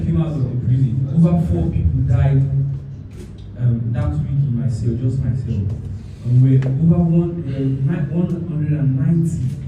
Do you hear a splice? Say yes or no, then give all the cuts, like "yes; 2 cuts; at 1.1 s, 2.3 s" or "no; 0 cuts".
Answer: no; 0 cuts